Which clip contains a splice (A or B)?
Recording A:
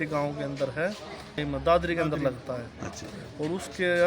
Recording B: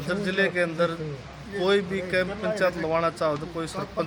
A